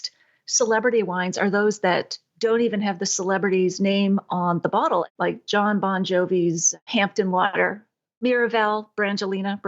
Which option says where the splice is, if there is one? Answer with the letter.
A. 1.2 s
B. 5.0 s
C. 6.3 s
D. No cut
B